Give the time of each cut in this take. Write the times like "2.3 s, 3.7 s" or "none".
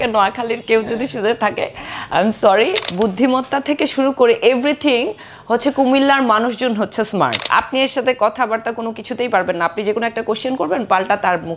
2.8 s, 7.5 s